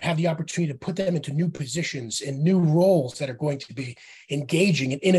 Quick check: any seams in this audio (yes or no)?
no